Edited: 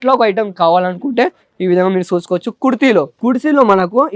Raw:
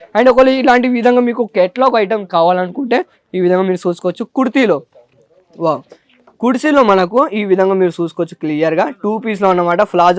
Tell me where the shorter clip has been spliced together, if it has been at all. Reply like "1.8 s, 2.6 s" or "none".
3.1 s